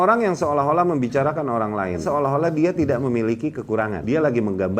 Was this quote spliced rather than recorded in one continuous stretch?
yes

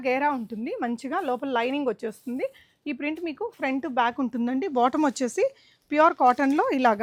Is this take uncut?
yes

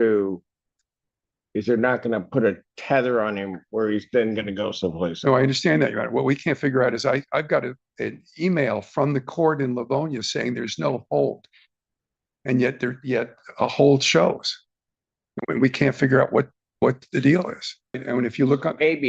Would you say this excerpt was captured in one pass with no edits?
no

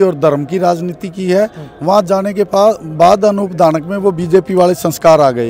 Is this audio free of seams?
yes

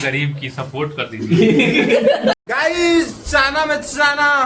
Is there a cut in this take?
yes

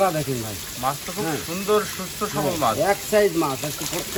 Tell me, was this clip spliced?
no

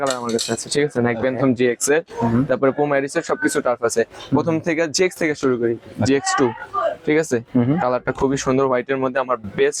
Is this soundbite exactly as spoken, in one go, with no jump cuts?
yes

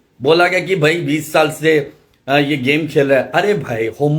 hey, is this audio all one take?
yes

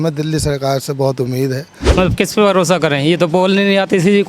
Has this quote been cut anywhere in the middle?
yes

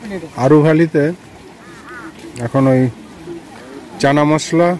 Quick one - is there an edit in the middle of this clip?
no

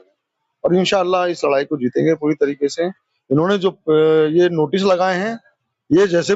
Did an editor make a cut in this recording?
no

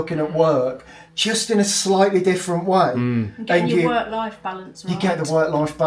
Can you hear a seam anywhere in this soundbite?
no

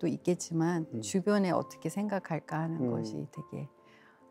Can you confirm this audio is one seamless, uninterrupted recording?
yes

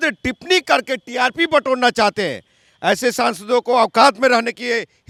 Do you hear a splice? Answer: no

